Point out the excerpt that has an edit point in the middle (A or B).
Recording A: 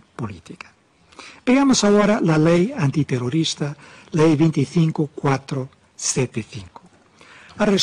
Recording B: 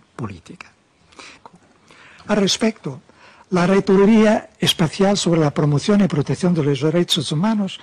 B